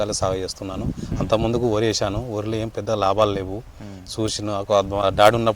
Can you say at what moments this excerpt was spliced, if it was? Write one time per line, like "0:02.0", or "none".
none

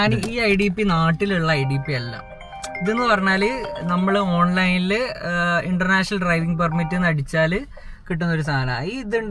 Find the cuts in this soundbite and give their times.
none

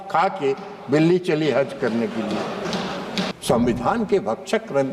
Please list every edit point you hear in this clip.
0:03.3

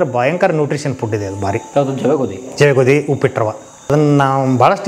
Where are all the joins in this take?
0:01.6
0:03.9

